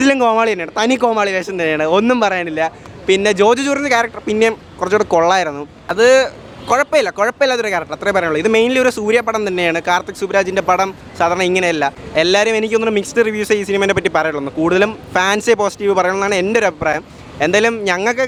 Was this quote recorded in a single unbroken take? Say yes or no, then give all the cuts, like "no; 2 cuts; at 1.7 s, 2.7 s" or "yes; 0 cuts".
yes; 0 cuts